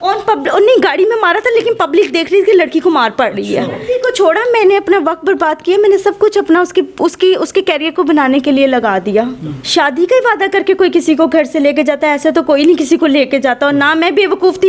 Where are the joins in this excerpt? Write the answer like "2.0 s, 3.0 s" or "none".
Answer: 3.8 s, 9.6 s